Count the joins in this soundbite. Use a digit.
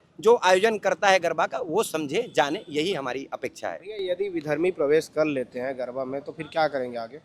0